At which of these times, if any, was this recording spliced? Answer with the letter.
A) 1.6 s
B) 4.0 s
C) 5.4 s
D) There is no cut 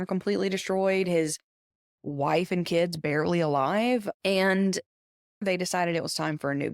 C